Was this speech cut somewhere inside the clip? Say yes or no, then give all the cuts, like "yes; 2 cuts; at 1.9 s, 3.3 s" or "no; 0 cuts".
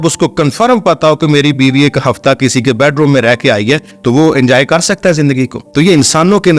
yes; 1 cut; at 5.6 s